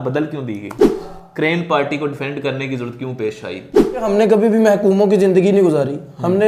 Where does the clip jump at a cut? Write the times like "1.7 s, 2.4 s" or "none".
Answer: 1.0 s, 4.0 s